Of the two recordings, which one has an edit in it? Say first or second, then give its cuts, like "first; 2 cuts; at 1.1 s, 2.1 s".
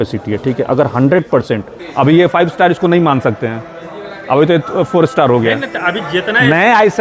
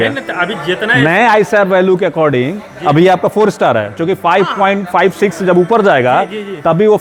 first; 1 cut; at 1.8 s